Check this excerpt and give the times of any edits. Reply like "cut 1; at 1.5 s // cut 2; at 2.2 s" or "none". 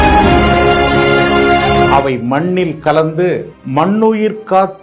cut 1; at 1.9 s